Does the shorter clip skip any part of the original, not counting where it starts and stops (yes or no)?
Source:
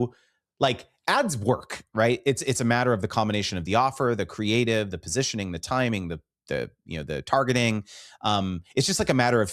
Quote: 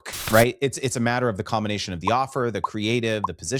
no